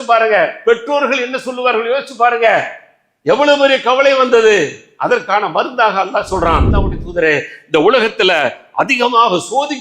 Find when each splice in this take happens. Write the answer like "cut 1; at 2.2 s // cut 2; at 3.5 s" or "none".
cut 1; at 6.8 s